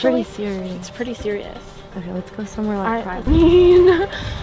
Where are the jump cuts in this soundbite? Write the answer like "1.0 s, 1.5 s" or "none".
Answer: 3.2 s